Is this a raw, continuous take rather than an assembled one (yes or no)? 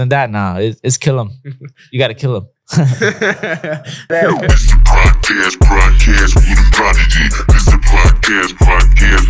no